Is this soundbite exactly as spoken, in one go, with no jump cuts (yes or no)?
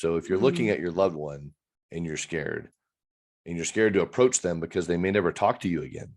yes